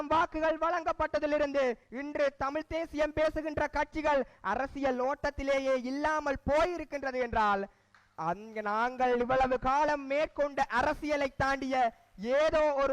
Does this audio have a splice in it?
no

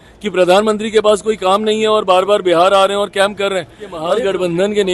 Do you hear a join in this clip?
yes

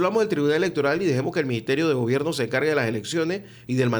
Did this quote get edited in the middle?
no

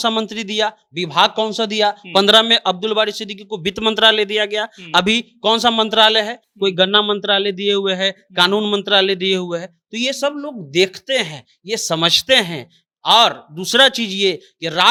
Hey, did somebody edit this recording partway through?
no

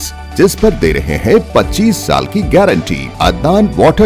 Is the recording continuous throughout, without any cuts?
no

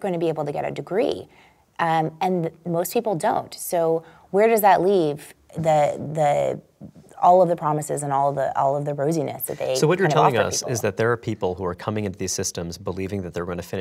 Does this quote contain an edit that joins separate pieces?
no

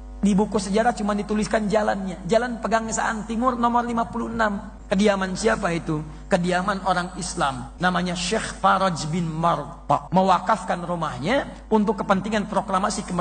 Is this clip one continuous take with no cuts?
no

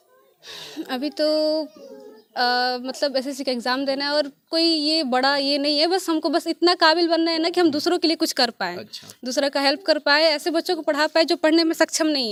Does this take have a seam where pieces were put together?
no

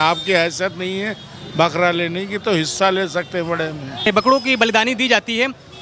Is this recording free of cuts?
no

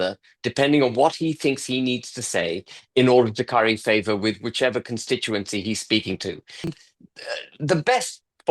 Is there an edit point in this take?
yes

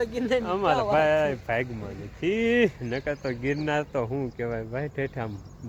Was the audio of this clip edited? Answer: no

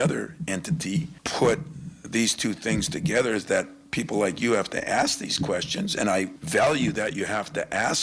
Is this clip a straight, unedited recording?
no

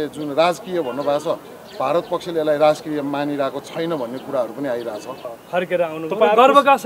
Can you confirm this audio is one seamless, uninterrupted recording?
no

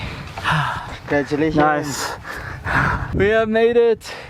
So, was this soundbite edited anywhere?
yes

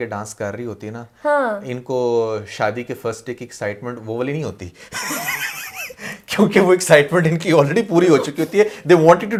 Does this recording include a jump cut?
no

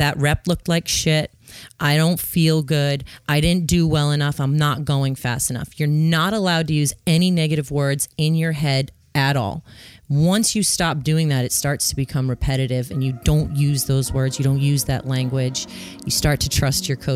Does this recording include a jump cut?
no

